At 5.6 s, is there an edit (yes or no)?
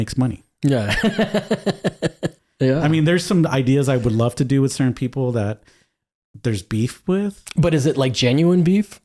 no